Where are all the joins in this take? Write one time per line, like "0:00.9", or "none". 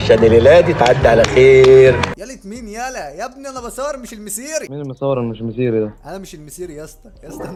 none